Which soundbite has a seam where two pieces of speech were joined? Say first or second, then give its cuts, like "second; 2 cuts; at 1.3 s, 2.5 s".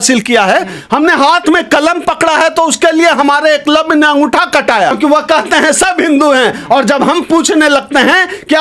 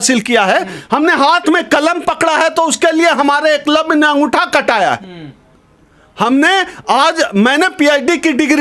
first; 1 cut; at 4.9 s